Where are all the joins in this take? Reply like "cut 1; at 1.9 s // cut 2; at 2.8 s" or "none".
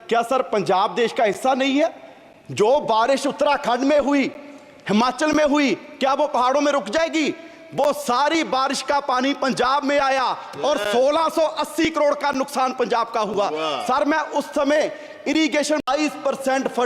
cut 1; at 15.8 s